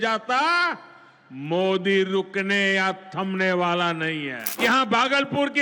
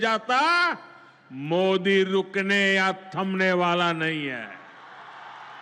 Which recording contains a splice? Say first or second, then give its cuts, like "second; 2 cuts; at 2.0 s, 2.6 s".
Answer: first; 1 cut; at 4.4 s